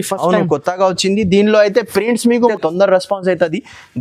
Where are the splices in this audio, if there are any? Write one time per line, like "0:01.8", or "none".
0:02.5